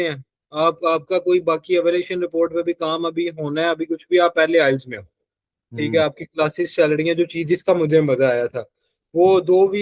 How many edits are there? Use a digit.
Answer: 0